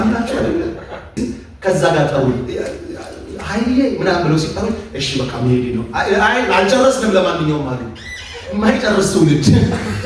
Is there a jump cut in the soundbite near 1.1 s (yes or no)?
yes